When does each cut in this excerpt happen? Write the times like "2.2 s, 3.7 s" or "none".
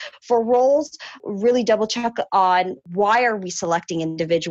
1.2 s, 2.8 s